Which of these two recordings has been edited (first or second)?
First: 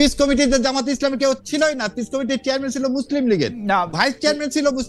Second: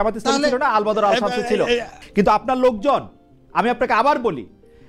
second